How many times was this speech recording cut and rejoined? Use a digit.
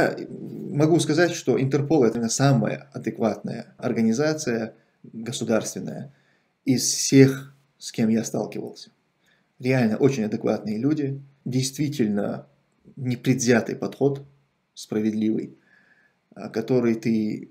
3